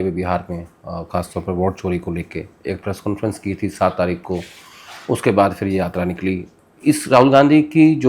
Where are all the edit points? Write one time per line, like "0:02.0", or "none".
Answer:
none